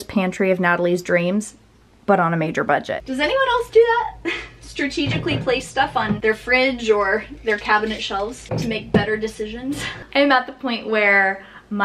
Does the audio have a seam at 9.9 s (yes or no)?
yes